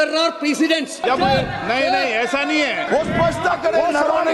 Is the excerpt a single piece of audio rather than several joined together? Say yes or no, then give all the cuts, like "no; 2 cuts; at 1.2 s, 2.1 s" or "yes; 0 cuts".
no; 2 cuts; at 1.0 s, 2.9 s